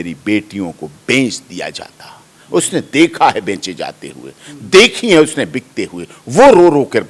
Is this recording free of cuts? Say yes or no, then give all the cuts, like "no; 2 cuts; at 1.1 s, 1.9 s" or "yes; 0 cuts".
yes; 0 cuts